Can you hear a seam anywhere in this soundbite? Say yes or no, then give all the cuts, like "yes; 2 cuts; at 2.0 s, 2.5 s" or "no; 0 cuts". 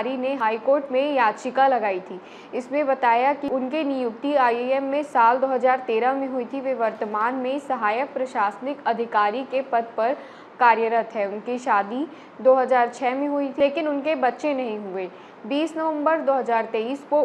no; 0 cuts